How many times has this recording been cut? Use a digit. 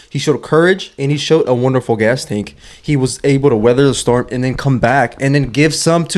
0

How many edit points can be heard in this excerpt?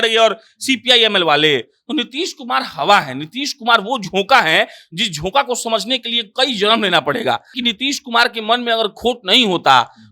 1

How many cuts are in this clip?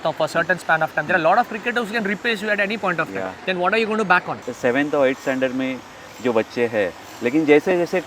1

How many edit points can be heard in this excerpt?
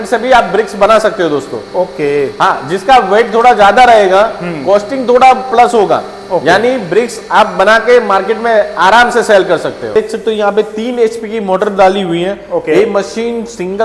1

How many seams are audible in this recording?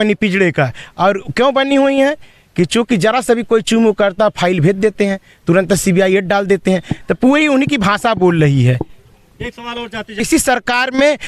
1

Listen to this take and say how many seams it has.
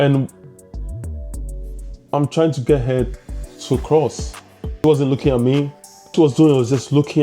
2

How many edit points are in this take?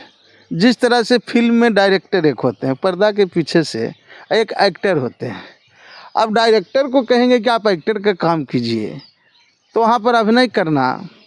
0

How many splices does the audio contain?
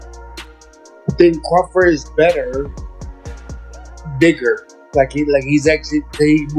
2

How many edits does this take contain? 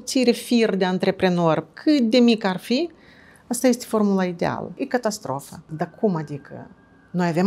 1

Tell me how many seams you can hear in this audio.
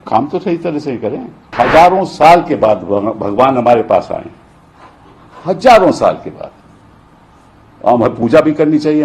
1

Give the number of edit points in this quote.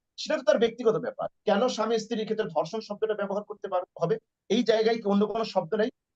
1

